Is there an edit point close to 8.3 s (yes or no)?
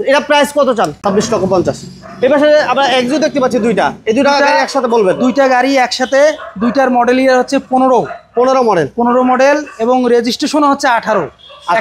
no